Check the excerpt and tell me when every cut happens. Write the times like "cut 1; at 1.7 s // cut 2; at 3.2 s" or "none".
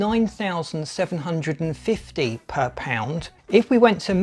cut 1; at 3.3 s